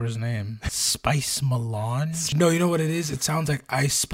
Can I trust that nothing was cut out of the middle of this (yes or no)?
no